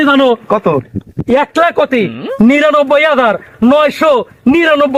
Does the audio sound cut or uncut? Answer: uncut